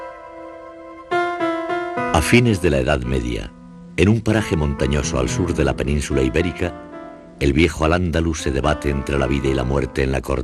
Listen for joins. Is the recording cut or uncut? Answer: cut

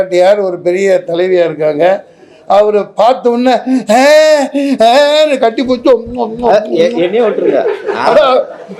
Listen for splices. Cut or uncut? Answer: uncut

